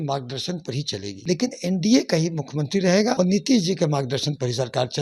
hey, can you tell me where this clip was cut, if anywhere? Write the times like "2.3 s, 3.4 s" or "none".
1.1 s, 3.1 s